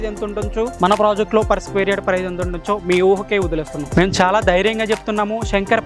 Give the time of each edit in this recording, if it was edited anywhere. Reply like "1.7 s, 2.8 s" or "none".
3.8 s